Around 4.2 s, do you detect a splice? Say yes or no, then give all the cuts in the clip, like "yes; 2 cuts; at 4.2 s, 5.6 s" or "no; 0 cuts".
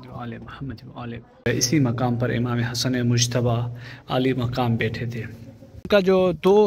no; 2 cuts; at 1.5 s, 5.9 s